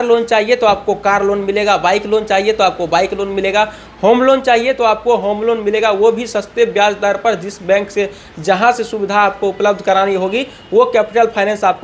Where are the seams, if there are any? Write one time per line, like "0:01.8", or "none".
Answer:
none